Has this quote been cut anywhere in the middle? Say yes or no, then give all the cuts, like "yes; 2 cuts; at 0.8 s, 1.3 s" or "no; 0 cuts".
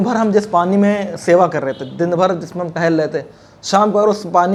no; 0 cuts